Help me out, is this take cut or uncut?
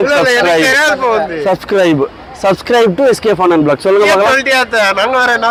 uncut